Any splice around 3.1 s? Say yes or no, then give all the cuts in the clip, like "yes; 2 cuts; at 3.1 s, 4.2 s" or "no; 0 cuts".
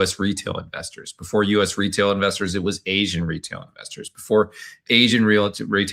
no; 0 cuts